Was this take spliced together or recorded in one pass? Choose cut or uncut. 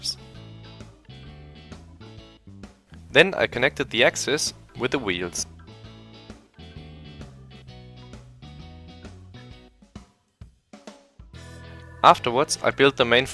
cut